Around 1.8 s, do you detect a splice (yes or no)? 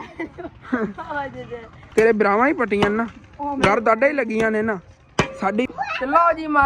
yes